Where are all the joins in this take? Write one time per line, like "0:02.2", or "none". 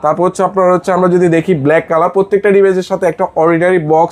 none